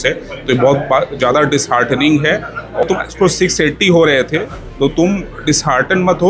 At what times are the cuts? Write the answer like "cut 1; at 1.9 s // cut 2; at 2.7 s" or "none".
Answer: cut 1; at 2.8 s